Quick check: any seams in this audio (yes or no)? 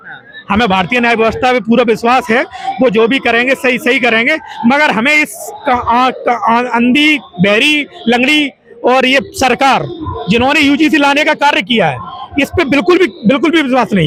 no